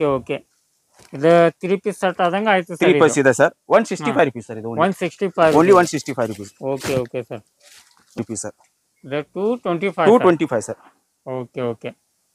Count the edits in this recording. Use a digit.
0